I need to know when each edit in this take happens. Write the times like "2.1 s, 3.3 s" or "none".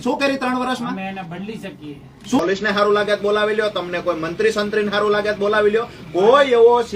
2.4 s